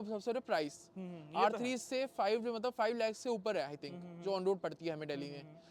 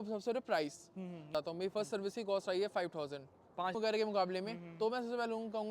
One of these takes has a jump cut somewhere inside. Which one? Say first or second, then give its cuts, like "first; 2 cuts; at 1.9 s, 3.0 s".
second; 2 cuts; at 1.3 s, 3.8 s